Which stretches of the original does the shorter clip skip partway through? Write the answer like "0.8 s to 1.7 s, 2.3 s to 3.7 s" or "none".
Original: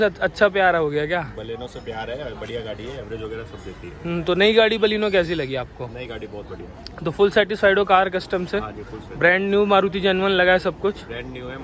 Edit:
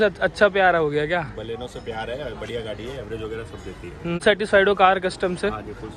4.2 s to 7.3 s

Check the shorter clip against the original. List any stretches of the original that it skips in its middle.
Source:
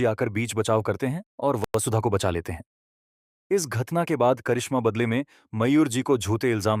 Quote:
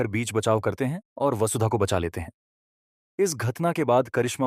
1.6 s to 1.7 s

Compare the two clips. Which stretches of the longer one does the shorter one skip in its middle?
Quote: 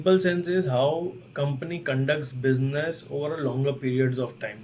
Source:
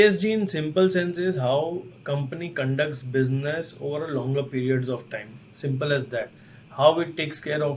none

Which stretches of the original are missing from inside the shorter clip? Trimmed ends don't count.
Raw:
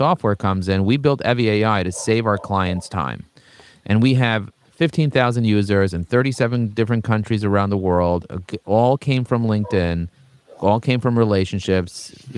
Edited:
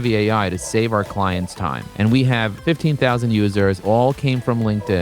3.2 s to 3.7 s, 4.4 s to 4.7 s, 5.9 s to 8.6 s

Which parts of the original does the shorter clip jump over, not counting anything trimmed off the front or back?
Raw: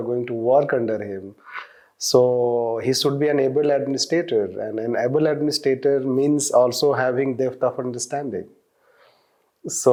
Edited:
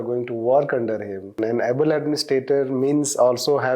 1.3 s to 4.6 s

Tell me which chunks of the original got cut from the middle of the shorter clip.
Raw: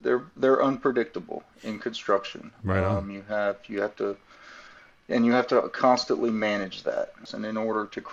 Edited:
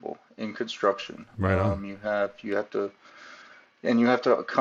none

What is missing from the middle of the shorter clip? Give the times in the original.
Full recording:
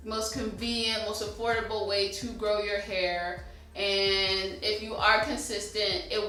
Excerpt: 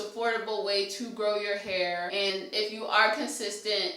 3.5 s to 4.4 s

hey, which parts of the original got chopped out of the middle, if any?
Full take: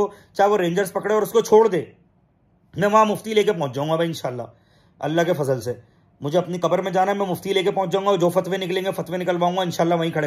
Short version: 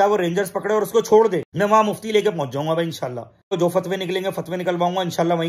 1.9 s to 2.7 s, 4.7 s to 8.1 s

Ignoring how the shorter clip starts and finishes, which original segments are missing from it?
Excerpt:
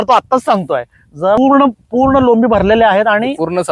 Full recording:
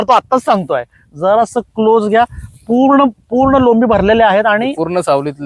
1.4 s to 2.8 s

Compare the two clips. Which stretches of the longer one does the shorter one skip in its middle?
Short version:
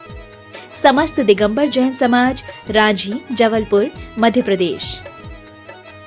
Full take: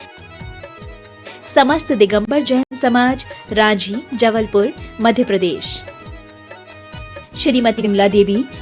2.6 s to 2.7 s

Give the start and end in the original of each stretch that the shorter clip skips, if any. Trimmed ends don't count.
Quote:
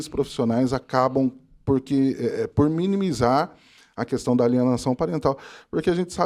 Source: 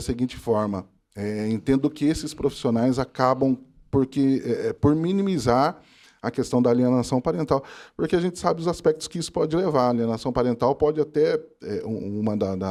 none

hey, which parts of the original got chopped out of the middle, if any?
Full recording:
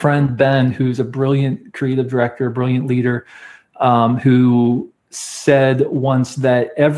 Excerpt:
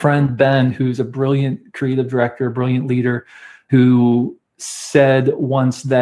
3.7 s to 4.2 s

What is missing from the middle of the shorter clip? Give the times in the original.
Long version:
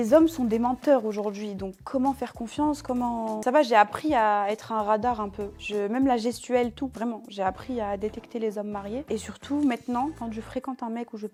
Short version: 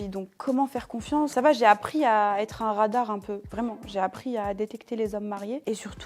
2.8 s to 3.4 s, 5.6 s to 6.9 s

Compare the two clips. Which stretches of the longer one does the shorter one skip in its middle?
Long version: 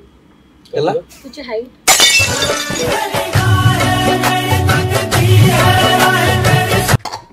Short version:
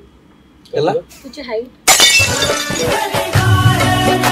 none

